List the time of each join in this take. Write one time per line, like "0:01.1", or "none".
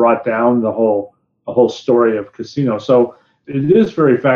0:03.3